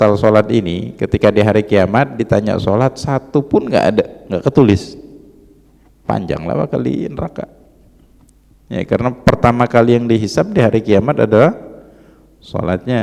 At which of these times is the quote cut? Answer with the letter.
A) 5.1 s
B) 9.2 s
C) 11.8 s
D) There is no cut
D